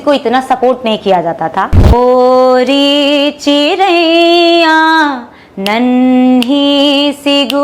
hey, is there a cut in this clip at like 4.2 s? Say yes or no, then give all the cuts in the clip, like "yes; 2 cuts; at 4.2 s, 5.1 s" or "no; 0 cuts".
no; 1 cut; at 1.9 s